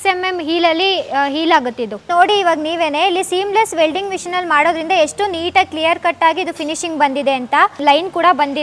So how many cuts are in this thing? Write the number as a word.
two